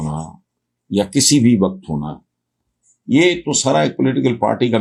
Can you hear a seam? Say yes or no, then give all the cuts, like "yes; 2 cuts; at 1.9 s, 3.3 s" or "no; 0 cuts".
no; 0 cuts